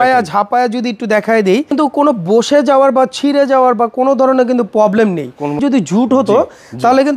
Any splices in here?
yes; 2 cuts; at 1.7 s, 5.6 s

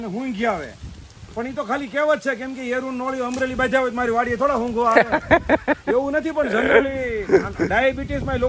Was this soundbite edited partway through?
no; 0 cuts

